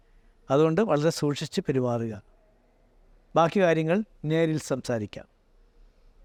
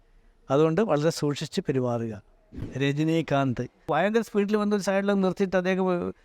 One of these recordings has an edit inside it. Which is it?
second; 2 cuts; at 2.6 s, 3.8 s

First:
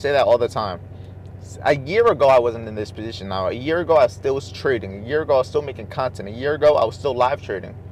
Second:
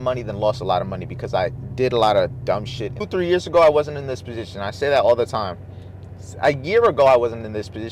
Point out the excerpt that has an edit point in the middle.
second; 1 cut; at 3.0 s

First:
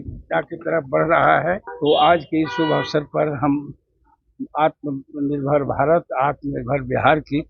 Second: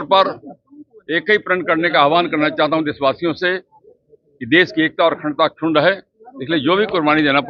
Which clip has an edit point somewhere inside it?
first; 1 cut; at 1.7 s

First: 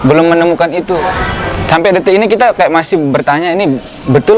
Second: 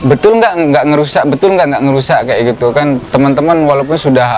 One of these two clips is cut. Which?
first; 1 cut; at 1.0 s

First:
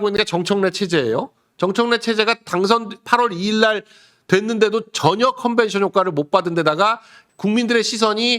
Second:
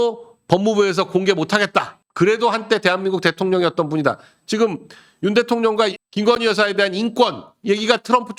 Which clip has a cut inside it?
first; 1 cut; at 7.1 s

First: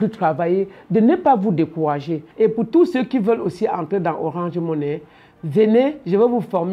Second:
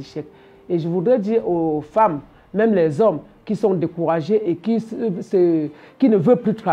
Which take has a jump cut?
first; 1 cut; at 2.2 s

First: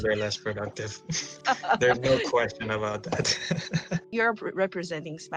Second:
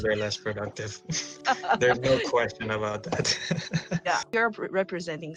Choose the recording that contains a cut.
first; 1 cut; at 4.0 s

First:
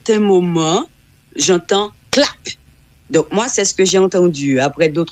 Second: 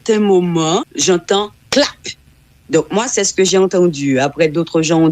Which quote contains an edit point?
second; 1 cut; at 0.9 s

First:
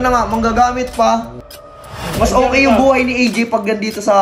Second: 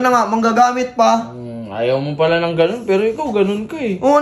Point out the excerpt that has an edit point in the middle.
first; 1 cut; at 1.8 s

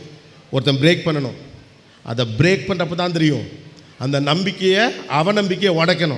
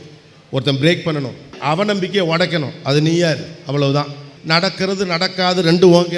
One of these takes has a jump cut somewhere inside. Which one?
second; 2 cuts; at 1.5 s, 4.3 s

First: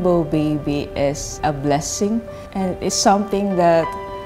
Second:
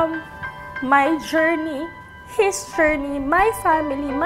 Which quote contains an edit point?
first; 2 cuts; at 1.3 s, 2.4 s

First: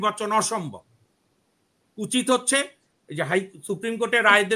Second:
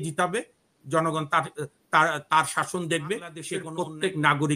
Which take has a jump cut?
second; 1 cut; at 3.6 s

